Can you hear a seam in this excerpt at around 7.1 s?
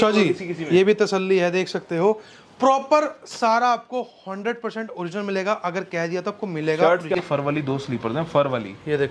yes; 1 cut; at 7.1 s

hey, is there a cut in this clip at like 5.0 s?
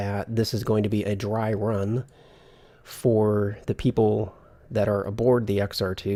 no; 0 cuts

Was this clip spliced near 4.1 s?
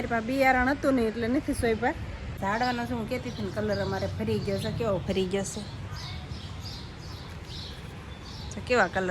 no; 1 cut; at 2.4 s

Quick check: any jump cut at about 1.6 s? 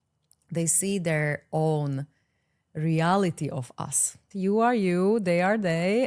no; 1 cut; at 4.2 s

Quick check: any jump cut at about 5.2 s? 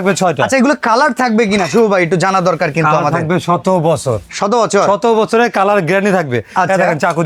no; 0 cuts

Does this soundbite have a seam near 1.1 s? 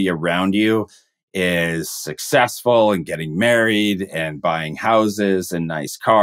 no; 0 cuts

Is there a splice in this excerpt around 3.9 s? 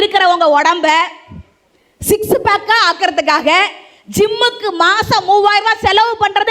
no; 0 cuts

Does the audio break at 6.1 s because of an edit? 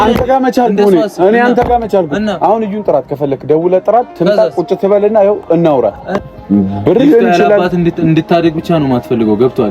yes; 1 cut; at 6.1 s

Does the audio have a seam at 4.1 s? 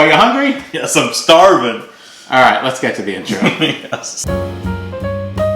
yes; 1 cut; at 4.1 s

